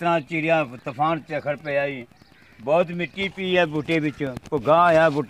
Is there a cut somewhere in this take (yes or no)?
no